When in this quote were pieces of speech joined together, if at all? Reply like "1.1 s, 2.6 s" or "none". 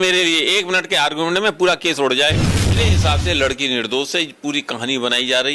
2.9 s